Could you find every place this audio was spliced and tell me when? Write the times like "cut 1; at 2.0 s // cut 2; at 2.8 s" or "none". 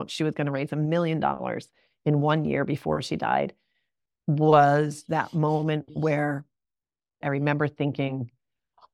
cut 1; at 7.2 s